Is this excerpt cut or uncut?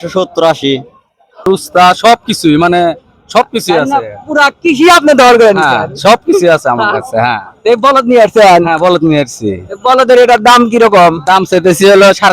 cut